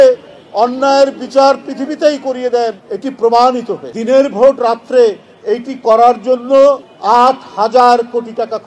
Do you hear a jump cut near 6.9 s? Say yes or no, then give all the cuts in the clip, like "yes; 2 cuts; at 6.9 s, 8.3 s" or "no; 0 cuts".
yes; 3 cuts; at 2.9 s, 3.9 s, 6.9 s